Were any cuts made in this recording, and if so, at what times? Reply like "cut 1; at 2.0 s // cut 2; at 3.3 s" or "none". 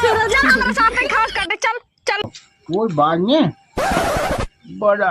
cut 1; at 2.4 s